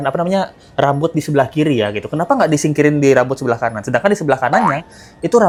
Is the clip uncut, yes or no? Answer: yes